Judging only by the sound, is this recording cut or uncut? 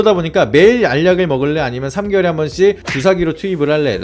uncut